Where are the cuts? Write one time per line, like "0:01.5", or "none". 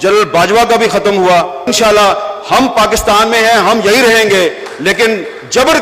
0:01.6